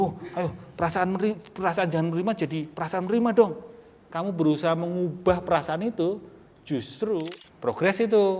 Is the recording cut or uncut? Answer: cut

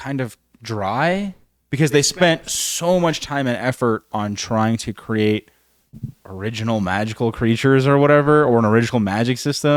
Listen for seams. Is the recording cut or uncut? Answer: uncut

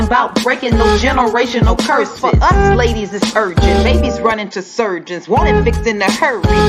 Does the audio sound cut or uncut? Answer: uncut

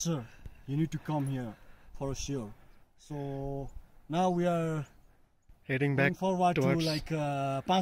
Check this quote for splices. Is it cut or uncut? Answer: uncut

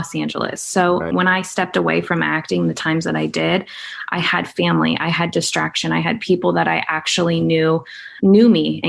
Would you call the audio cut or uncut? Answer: cut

